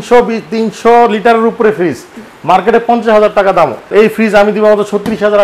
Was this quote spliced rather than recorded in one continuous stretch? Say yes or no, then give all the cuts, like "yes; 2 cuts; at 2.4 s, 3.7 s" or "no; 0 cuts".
yes; 1 cut; at 3.9 s